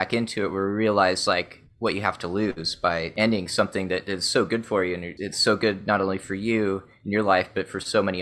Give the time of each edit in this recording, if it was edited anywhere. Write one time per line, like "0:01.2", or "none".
0:03.1
0:05.1

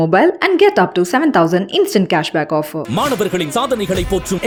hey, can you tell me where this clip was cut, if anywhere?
none

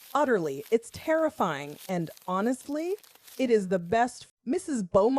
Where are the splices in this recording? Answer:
0:04.2

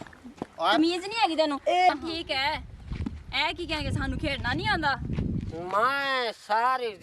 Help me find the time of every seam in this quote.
0:01.9

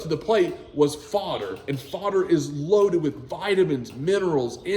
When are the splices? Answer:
0:01.6

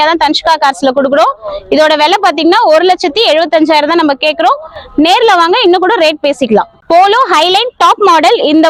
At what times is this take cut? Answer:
none

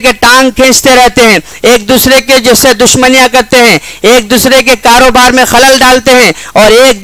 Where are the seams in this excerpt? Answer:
none

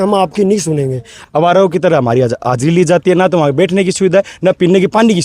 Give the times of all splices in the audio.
0:01.2

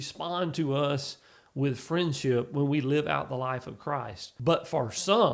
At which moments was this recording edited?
0:04.2

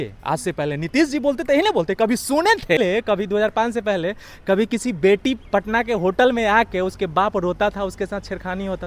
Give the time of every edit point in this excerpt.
0:02.8

